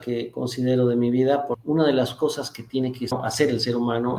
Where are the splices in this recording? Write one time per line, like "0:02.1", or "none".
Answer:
0:01.6
0:03.1